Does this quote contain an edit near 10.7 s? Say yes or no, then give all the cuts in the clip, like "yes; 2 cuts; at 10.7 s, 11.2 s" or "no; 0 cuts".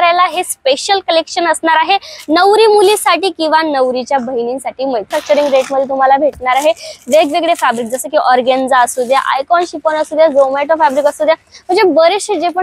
no; 1 cut; at 5.1 s